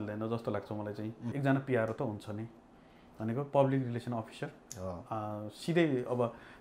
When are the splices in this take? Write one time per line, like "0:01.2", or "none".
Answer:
0:01.2